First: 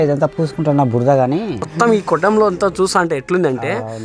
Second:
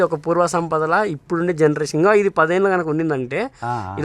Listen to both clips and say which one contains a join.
first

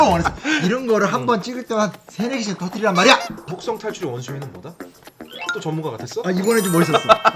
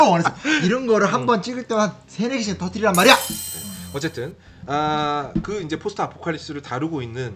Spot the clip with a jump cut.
first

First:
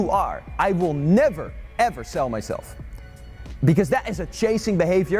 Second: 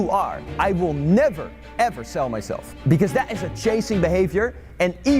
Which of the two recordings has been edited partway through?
second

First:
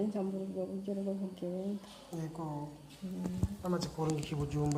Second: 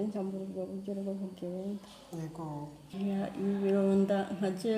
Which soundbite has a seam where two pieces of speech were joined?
second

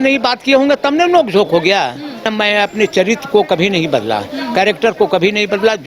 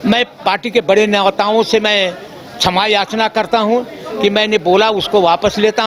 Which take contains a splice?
first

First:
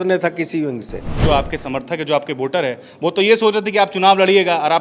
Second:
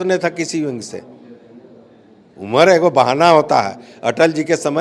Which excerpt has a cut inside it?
first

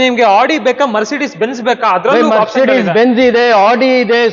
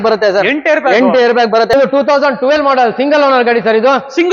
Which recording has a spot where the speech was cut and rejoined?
second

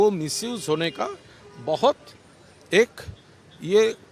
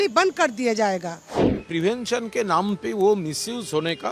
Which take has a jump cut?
second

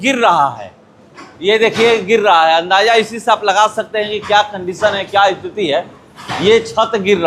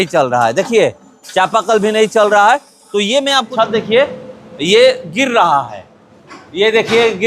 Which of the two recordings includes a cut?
second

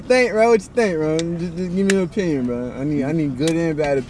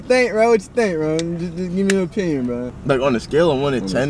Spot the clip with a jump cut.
second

